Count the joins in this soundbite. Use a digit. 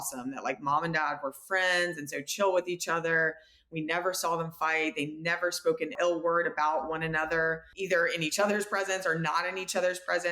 1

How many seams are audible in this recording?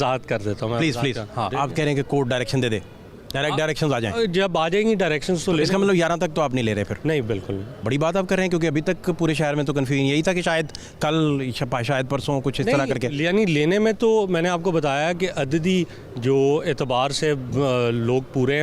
2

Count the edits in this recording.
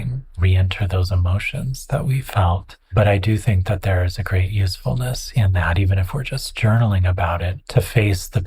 2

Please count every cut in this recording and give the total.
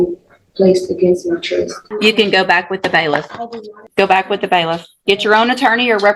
2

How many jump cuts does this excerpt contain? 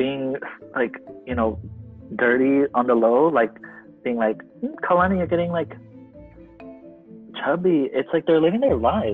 2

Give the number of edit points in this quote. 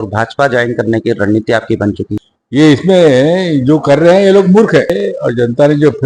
2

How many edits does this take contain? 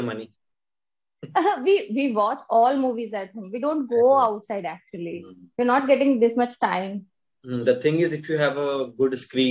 0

